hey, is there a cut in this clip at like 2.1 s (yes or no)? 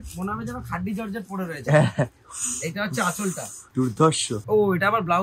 no